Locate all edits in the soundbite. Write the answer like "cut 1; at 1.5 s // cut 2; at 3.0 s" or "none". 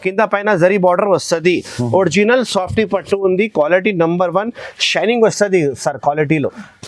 none